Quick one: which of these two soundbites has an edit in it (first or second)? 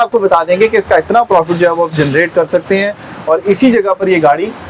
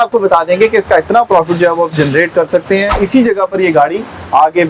second